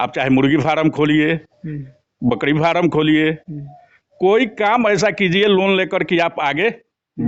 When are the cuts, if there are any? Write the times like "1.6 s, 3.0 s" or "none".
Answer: none